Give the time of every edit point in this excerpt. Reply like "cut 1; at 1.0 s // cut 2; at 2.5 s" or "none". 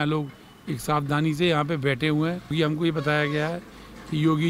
cut 1; at 2.5 s